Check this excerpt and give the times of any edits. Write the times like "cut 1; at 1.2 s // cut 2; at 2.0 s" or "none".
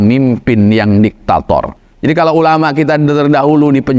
cut 1; at 1.7 s